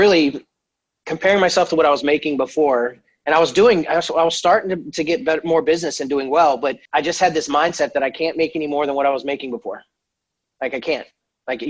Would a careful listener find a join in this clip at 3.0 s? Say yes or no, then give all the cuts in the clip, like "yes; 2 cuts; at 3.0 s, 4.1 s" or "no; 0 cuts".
no; 1 cut; at 6.8 s